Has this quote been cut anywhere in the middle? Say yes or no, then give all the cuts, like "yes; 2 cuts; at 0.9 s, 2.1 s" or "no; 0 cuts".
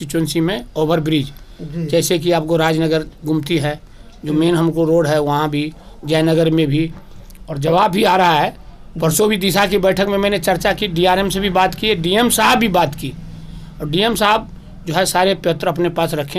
no; 0 cuts